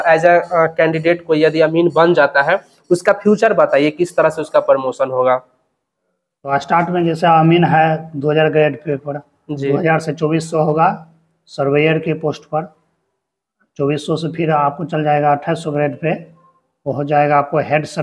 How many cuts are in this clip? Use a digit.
0